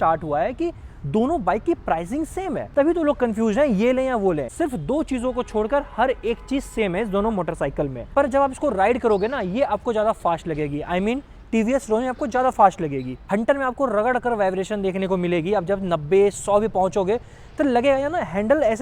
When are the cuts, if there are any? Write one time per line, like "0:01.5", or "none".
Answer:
0:02.7
0:04.5
0:08.0
0:13.2